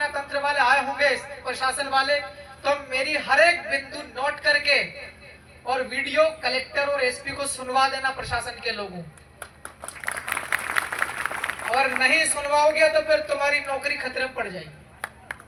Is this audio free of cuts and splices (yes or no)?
yes